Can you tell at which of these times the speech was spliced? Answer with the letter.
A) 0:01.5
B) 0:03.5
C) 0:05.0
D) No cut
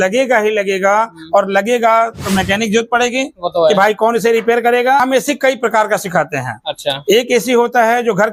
C